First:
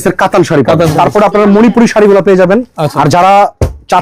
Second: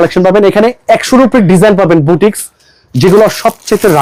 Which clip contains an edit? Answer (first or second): first